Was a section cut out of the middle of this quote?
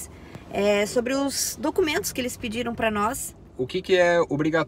yes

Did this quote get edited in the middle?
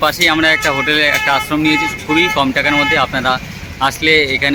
no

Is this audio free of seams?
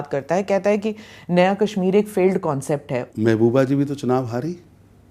no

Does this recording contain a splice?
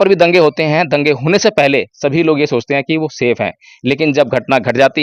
no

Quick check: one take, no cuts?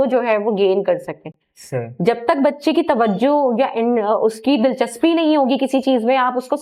yes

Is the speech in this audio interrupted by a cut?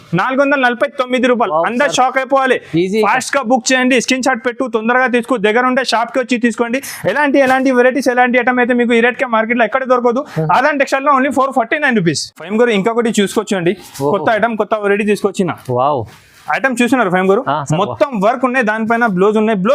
no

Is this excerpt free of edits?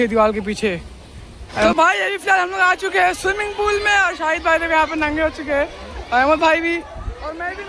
no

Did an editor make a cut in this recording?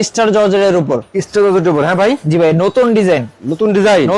no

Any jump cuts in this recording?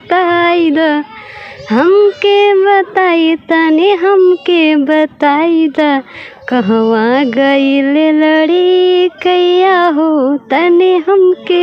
no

